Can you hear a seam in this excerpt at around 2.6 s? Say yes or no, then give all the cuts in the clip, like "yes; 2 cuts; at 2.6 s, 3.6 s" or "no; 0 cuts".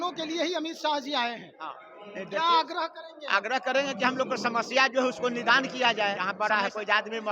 no; 1 cut; at 6.3 s